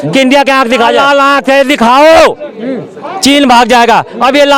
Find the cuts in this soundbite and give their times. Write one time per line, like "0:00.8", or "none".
0:01.0